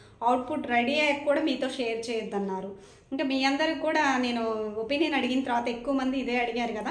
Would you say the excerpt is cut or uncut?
uncut